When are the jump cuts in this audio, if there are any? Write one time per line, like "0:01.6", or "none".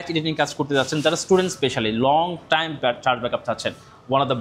none